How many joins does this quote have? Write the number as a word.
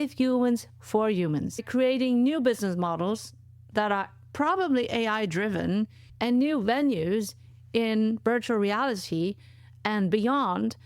two